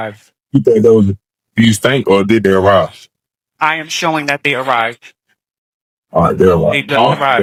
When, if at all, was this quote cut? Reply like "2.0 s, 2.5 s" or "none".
none